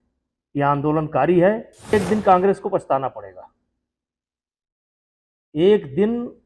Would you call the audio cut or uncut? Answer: cut